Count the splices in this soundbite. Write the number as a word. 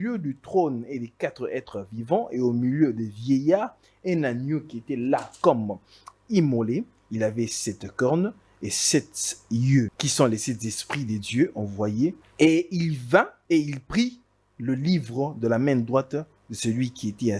three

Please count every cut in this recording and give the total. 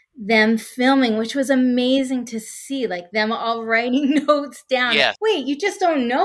one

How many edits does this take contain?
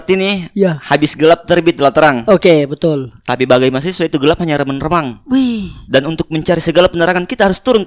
zero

